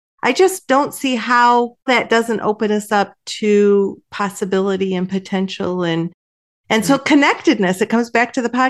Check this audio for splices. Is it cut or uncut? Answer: uncut